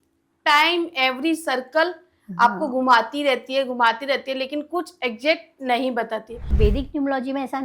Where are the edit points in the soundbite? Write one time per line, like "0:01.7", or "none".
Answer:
0:06.5